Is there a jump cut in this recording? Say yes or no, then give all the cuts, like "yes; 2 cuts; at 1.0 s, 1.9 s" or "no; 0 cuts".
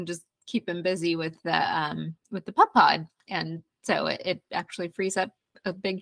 no; 0 cuts